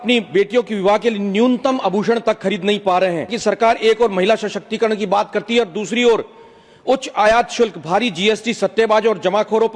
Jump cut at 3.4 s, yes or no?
yes